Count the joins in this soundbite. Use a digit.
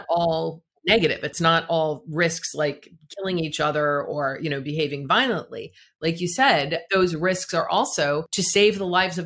2